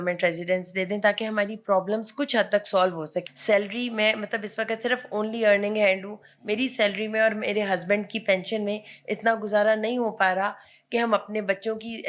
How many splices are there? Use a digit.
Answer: 1